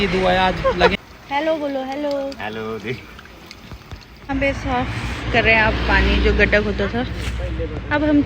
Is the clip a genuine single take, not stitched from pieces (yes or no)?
no